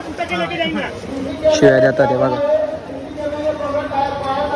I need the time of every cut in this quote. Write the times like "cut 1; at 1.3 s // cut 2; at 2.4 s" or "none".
none